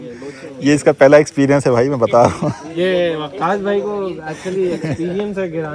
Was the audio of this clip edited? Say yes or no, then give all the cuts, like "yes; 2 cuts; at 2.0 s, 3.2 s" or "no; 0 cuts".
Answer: yes; 1 cut; at 2.6 s